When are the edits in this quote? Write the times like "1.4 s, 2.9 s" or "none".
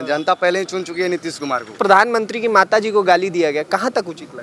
1.8 s